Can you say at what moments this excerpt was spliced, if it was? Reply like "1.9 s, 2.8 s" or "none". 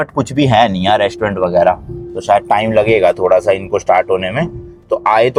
none